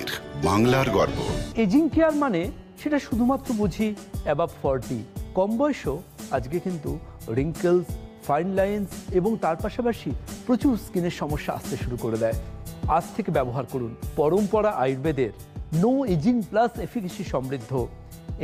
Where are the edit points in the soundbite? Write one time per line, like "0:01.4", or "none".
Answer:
0:01.4